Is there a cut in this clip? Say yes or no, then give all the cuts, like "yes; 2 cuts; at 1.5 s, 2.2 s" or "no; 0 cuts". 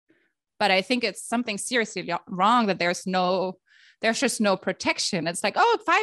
no; 0 cuts